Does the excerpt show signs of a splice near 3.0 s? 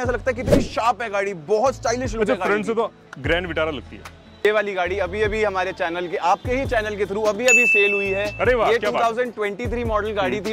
no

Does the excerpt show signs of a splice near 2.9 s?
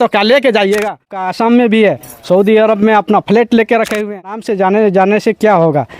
no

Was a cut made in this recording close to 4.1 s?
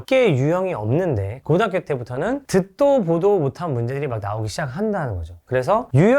no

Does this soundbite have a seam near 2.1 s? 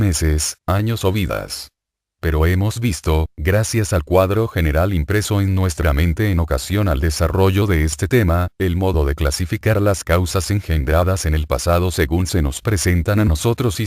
yes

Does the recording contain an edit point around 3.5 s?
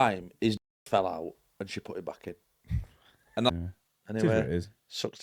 yes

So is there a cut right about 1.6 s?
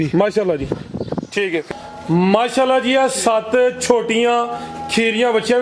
yes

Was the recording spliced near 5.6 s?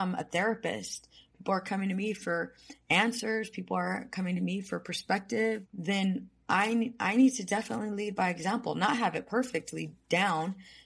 yes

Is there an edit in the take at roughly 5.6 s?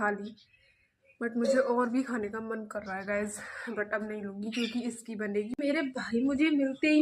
yes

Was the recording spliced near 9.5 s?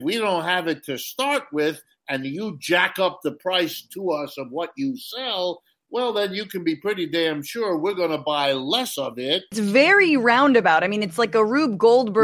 yes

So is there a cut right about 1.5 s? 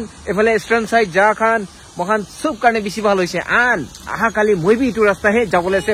no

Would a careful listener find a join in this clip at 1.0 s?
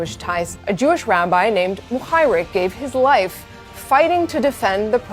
no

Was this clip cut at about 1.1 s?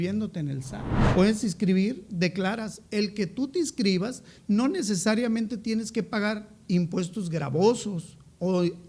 yes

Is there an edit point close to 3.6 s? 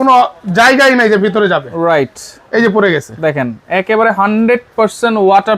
no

